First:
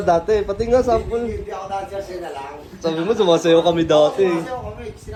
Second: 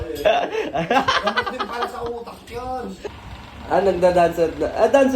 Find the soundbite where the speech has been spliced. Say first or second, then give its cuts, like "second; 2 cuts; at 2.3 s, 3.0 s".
second; 1 cut; at 3.2 s